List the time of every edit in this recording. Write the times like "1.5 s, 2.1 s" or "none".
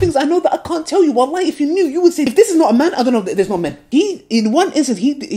none